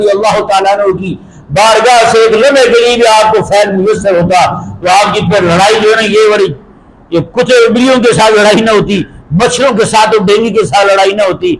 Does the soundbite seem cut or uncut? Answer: uncut